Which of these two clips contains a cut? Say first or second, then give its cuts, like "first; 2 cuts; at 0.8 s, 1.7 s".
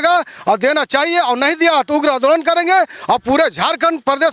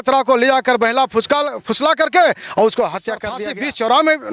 second; 1 cut; at 3.3 s